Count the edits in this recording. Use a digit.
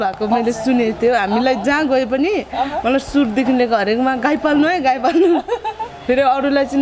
0